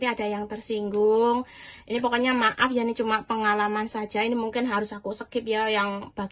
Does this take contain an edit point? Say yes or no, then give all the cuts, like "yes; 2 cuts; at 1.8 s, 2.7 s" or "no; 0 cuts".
no; 0 cuts